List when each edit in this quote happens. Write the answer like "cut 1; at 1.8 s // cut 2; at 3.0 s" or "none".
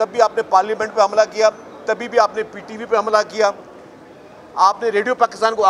none